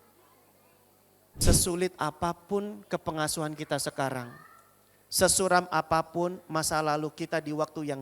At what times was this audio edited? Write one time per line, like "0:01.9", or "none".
0:01.5

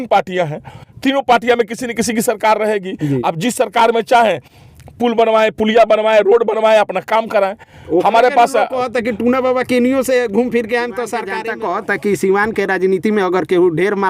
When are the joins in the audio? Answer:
0:11.3

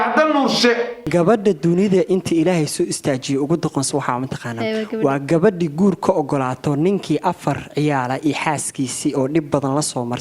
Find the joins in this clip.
0:00.9

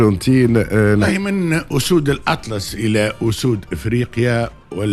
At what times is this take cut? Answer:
0:01.1

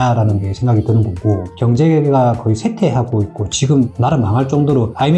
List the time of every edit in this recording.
0:01.5

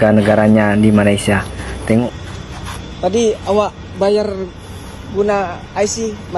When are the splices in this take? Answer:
0:02.1

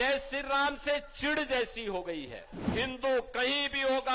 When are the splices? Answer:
0:02.7

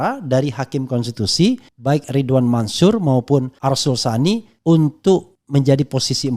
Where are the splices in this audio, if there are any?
0:01.7
0:03.5
0:04.5
0:05.4

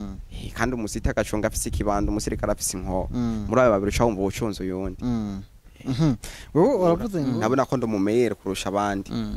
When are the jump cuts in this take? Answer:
0:07.1

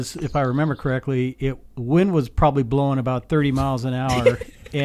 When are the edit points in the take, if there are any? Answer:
none

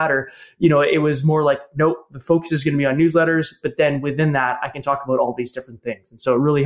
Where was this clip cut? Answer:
none

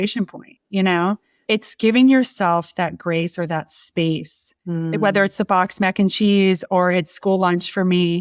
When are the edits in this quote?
0:01.3

